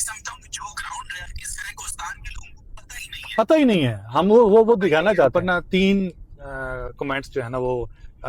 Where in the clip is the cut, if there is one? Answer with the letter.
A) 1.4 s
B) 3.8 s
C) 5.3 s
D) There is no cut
C